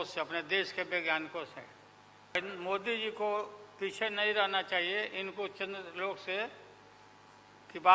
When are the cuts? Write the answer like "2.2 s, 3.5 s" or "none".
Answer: 2.4 s